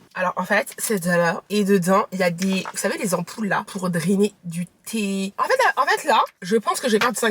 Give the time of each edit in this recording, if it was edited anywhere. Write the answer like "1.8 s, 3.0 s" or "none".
1.4 s, 5.3 s